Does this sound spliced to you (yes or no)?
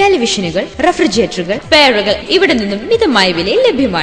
yes